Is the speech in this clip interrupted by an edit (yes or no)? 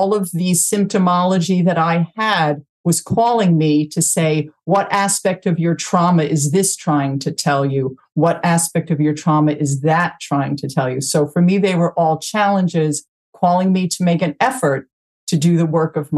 no